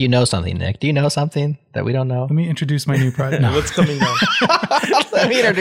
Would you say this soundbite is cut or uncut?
uncut